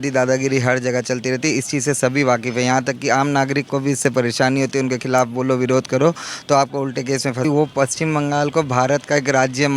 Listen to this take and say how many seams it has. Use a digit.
1